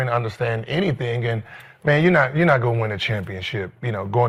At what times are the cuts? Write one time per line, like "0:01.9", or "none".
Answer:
none

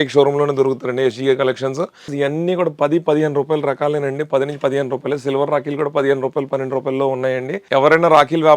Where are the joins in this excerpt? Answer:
0:02.1
0:07.6

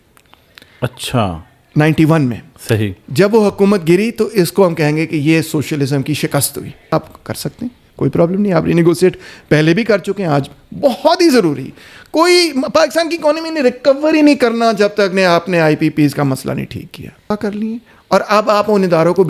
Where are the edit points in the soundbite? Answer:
0:06.9
0:17.3

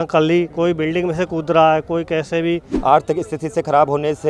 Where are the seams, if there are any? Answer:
0:02.7

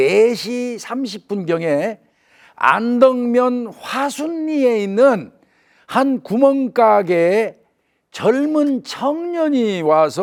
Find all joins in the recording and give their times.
none

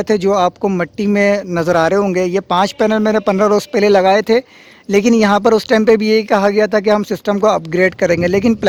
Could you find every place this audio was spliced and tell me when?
none

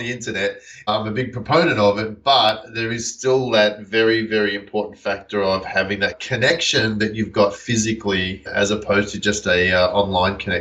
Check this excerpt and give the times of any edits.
0:00.9
0:06.2
0:08.5

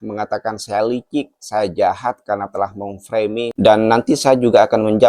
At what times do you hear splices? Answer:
0:03.5

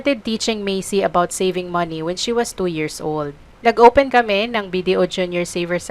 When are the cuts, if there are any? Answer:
0:03.4
0:04.1

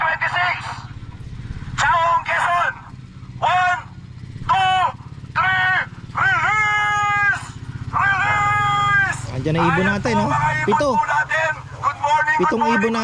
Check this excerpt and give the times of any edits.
none

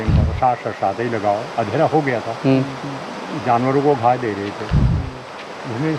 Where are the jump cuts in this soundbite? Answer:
none

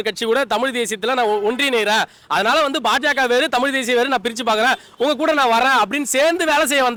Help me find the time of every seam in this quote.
none

